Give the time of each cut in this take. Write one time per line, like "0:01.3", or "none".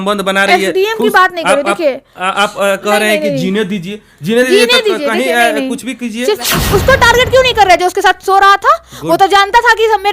0:06.5